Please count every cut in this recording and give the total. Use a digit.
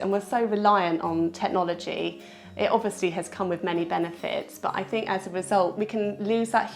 1